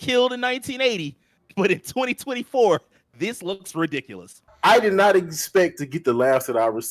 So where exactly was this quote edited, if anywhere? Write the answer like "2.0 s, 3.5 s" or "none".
4.5 s